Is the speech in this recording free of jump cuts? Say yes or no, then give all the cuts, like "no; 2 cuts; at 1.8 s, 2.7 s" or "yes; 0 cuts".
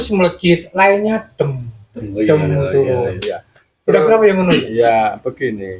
yes; 0 cuts